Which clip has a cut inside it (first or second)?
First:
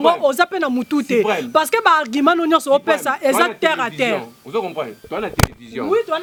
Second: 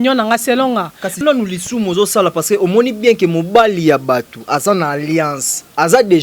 second